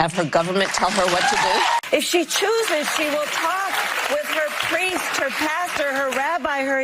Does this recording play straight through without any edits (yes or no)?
no